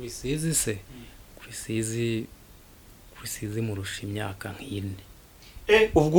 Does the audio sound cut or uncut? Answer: uncut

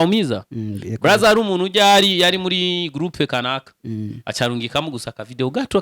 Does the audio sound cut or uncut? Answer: uncut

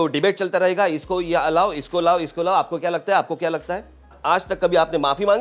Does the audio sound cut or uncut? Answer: cut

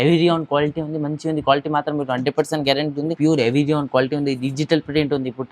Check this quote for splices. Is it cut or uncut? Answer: cut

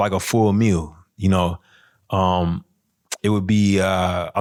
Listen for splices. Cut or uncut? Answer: uncut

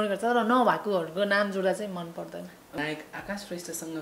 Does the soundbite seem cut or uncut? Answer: cut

